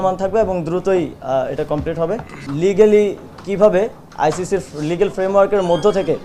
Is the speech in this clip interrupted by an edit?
yes; 1 cut; at 2.5 s

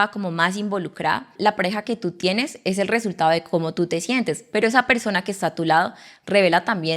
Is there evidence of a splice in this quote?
yes; 1 cut; at 1.3 s

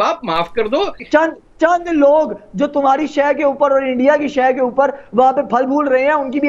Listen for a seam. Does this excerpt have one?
yes; 1 cut; at 1.0 s

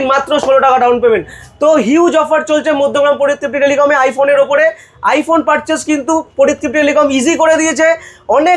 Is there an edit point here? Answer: no; 0 cuts

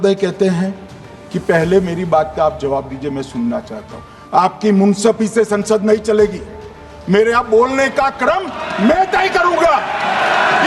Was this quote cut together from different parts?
no; 0 cuts

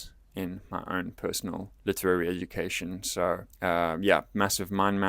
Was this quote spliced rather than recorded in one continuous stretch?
yes; 2 cuts; at 1.7 s, 3.5 s

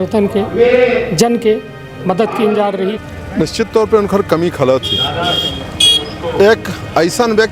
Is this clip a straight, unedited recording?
no; 1 cut; at 2.9 s

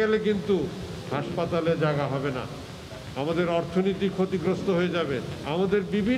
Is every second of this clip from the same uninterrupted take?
yes; 0 cuts

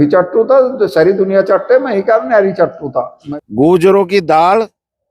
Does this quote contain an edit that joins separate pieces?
yes; 1 cut; at 3.2 s

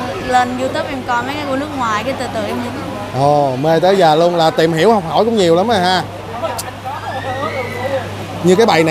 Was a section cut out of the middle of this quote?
no; 0 cuts

